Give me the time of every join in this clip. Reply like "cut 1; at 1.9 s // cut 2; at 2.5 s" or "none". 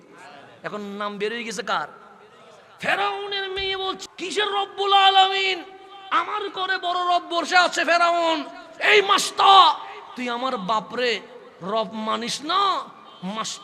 cut 1; at 3.9 s